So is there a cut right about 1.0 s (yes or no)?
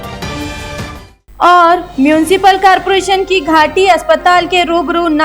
yes